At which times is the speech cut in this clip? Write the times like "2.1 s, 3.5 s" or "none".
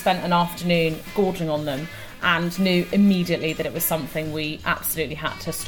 1.0 s